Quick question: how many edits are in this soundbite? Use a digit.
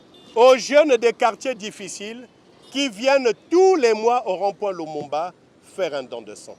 0